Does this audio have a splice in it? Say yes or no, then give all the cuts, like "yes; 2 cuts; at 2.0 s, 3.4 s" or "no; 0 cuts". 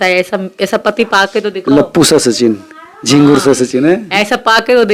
no; 0 cuts